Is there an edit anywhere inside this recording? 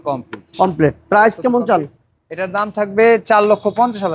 no; 0 cuts

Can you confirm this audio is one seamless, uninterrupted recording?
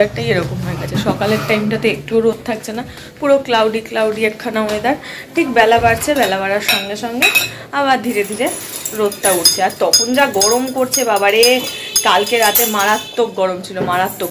yes; 0 cuts

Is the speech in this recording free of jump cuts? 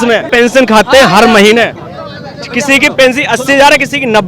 yes; 0 cuts

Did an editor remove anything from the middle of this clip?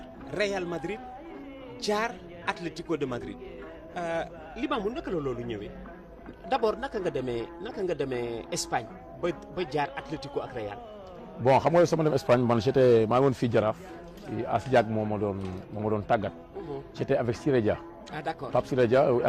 yes; 1 cut; at 4.2 s

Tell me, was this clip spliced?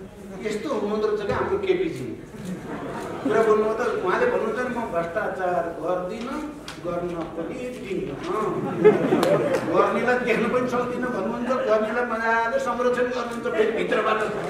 no; 0 cuts

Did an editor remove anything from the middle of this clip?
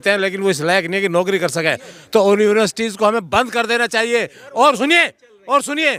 no; 0 cuts

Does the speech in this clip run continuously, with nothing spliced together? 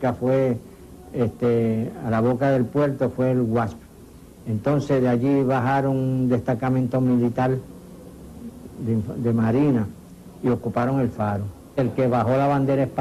yes; 0 cuts

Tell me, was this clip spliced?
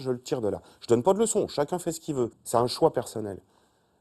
yes; 1 cut; at 2.4 s

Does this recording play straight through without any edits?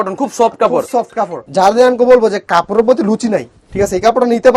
no; 1 cut; at 1.4 s

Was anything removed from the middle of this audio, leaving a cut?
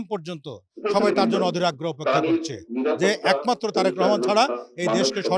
no; 0 cuts

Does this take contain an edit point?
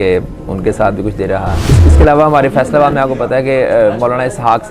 yes; 1 cut; at 1.6 s

